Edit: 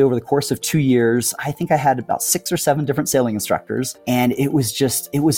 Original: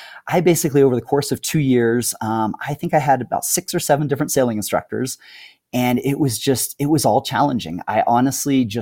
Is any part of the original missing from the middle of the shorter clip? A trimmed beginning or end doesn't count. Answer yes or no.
yes